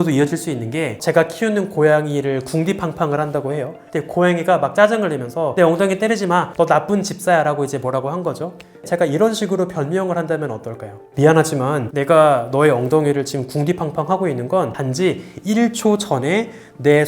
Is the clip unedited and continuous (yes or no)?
no